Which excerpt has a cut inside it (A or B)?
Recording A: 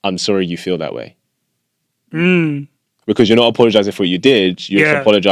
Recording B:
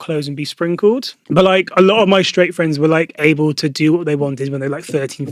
B